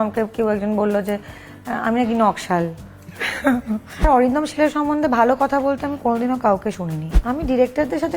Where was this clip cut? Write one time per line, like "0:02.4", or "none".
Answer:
0:04.0
0:07.1